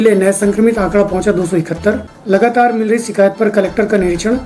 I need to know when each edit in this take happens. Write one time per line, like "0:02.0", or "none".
0:02.1

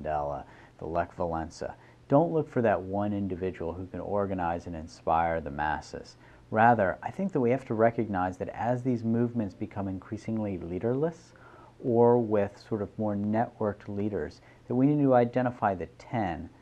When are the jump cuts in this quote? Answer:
none

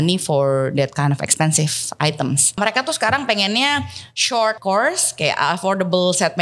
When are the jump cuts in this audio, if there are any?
0:02.6
0:04.6

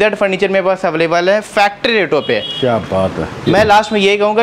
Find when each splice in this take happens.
none

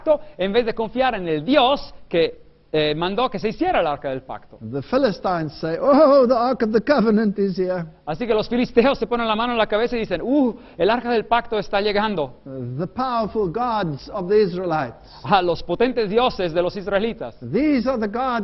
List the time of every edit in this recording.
0:07.3

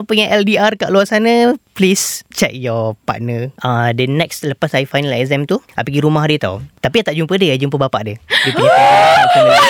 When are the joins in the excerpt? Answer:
0:03.5
0:06.7

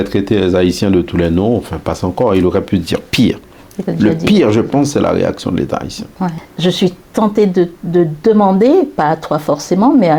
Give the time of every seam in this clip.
0:06.4

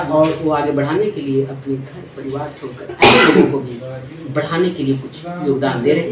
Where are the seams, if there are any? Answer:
none

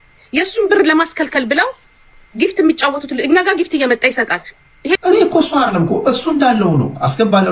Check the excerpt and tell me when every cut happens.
0:05.0

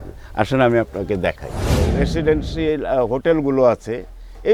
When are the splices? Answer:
0:01.8

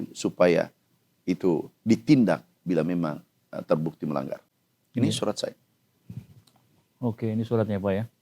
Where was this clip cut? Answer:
none

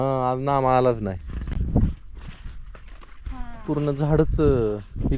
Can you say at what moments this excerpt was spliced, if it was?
0:01.6

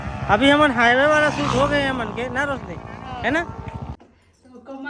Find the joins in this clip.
0:03.9

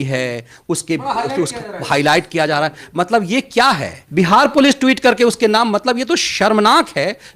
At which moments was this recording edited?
0:04.0

